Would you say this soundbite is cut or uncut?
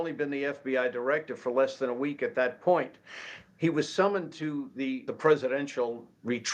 cut